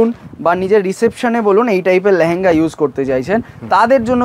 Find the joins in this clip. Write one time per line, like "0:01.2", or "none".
none